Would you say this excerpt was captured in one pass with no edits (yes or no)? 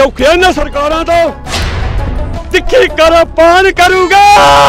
no